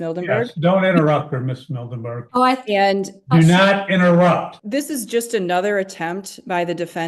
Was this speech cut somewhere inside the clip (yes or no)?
yes